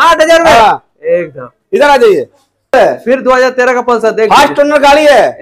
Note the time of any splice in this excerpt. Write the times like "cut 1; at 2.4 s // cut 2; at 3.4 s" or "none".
none